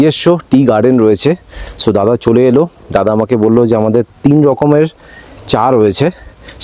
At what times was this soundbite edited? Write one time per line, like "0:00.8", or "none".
none